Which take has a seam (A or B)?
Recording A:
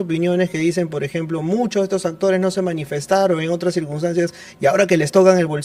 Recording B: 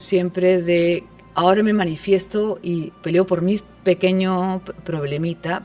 B